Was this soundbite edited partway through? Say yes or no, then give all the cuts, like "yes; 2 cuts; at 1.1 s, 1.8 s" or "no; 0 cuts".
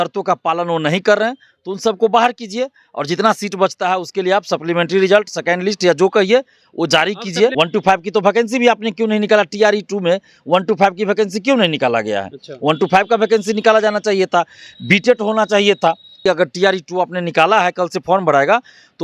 yes; 2 cuts; at 7.5 s, 16.2 s